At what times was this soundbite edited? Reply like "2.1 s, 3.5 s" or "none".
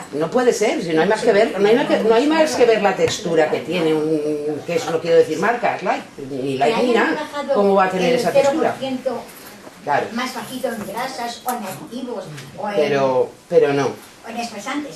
8.5 s